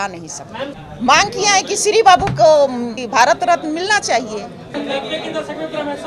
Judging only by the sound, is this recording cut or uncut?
cut